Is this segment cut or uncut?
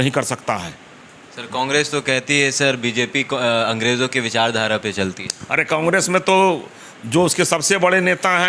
uncut